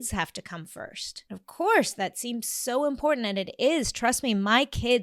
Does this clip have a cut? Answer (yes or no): yes